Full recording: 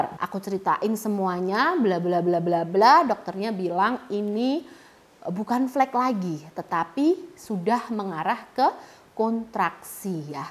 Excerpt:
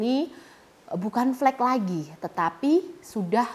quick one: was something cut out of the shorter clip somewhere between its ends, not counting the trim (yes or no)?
no